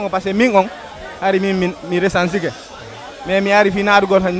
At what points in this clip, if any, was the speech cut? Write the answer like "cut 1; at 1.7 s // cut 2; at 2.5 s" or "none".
none